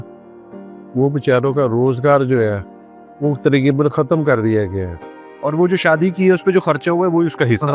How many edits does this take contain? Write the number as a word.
one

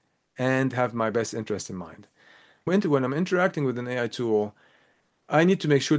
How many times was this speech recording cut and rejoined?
one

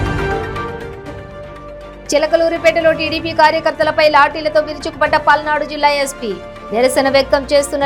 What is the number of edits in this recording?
one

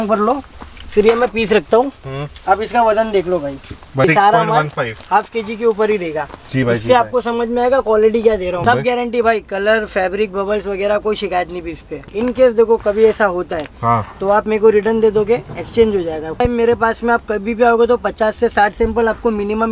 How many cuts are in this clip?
four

